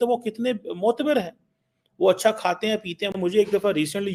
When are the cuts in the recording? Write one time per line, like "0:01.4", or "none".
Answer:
none